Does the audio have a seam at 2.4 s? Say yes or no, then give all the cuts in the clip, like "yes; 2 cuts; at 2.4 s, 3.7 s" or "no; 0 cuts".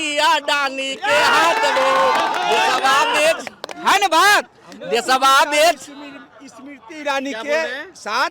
no; 0 cuts